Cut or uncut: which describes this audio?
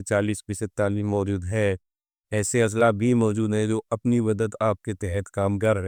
uncut